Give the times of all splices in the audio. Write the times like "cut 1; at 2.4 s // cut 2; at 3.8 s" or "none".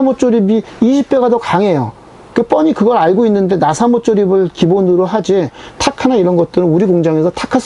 none